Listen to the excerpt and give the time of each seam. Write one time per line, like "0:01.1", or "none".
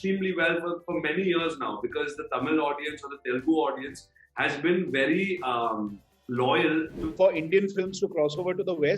0:06.9

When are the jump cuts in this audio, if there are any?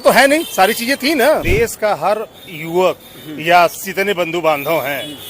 0:01.4
0:03.8

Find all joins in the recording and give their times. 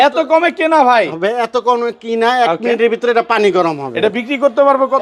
none

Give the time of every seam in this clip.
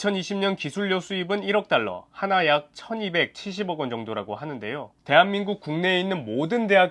0:04.9

